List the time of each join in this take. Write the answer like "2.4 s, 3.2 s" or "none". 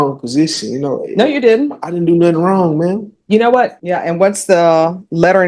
3.8 s

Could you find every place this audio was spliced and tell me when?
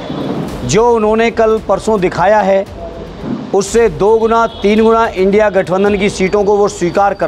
none

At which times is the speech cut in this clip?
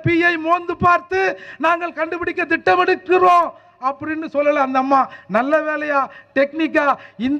none

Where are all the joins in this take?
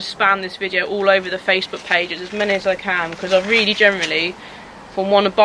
none

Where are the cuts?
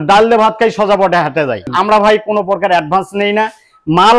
1.7 s

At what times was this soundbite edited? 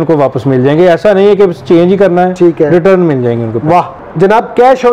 4.0 s

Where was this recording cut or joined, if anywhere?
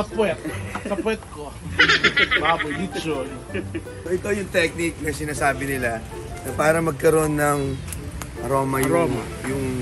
3.9 s

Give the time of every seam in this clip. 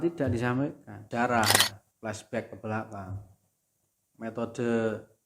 1.0 s

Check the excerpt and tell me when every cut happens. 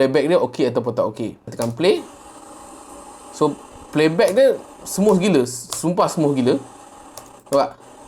1.5 s

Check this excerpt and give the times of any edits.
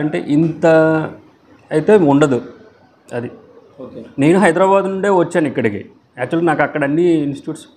none

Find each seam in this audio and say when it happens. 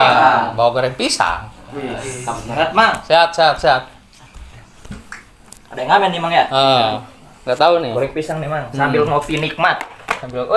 none

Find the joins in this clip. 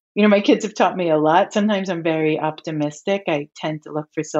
none

